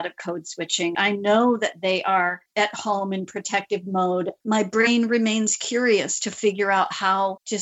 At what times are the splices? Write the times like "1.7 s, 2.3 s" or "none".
0.9 s, 4.4 s